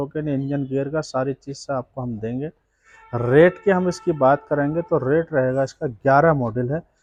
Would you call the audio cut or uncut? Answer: uncut